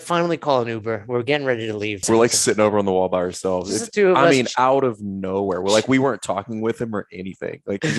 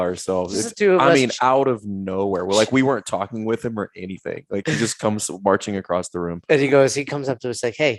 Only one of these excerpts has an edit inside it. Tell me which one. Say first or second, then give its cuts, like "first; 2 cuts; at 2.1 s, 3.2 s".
first; 1 cut; at 2.0 s